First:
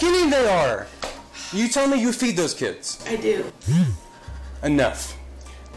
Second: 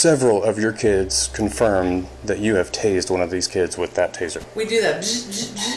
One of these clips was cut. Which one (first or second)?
second